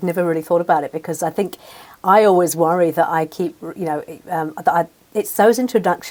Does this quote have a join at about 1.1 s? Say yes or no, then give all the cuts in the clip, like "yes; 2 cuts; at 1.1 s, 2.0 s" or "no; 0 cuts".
no; 0 cuts